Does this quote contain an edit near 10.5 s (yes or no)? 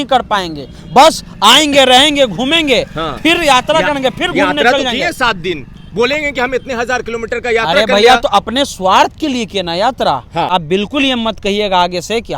yes